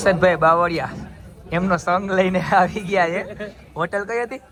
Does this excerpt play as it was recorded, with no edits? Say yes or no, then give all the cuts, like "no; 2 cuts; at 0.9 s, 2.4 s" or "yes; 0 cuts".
yes; 0 cuts